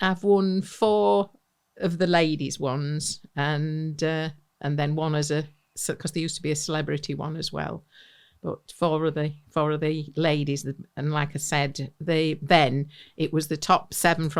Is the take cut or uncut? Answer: uncut